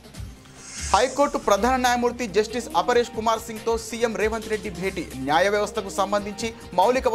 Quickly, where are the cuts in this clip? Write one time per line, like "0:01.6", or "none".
0:00.9